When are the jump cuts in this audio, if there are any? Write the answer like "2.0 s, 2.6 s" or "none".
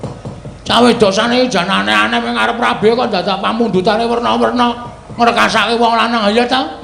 none